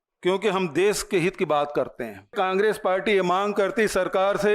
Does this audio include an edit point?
yes; 1 cut; at 2.3 s

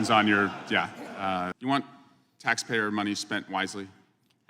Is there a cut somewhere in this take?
yes; 1 cut; at 1.5 s

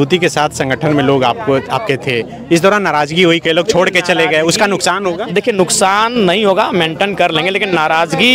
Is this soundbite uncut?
yes; 0 cuts

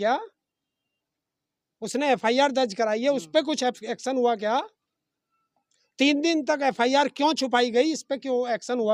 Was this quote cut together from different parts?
no; 0 cuts

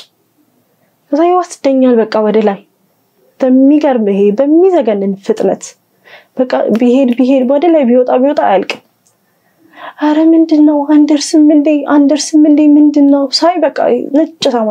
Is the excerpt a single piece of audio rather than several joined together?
yes; 0 cuts

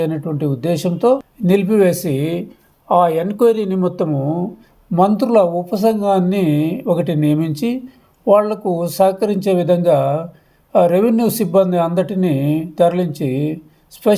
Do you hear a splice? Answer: no; 0 cuts

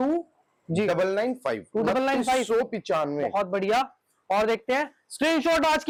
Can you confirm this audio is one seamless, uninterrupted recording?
yes; 0 cuts

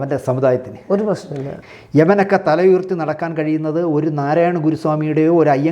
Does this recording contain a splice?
yes; 1 cut; at 1.5 s

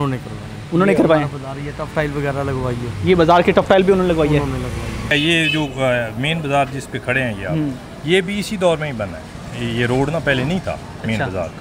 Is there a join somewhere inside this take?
yes; 1 cut; at 4.9 s

